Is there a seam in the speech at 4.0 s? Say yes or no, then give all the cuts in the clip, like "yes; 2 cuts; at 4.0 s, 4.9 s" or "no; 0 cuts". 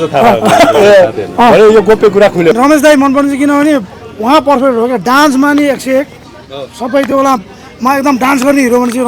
no; 1 cut; at 2.6 s